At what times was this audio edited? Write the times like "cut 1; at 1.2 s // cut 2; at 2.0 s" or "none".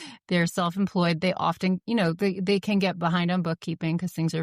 none